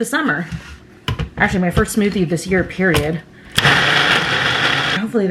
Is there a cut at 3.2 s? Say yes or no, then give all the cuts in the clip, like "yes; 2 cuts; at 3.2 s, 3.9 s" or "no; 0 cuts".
no; 0 cuts